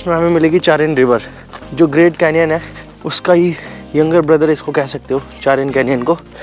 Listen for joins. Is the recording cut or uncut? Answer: uncut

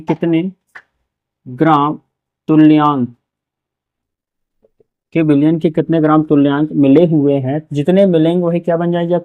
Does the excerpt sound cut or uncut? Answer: uncut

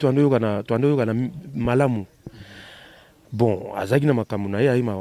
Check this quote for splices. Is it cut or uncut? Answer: uncut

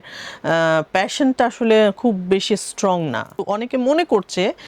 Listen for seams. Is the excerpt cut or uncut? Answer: cut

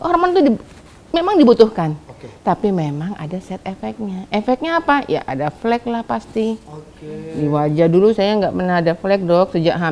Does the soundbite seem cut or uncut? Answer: uncut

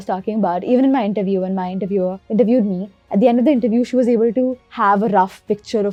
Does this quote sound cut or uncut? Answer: uncut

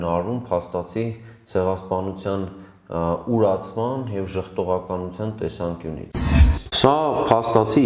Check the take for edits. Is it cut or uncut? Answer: cut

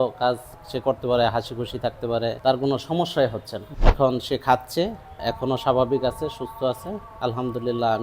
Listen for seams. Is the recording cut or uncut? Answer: cut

